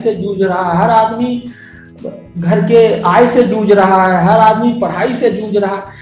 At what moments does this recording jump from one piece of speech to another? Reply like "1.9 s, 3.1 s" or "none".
none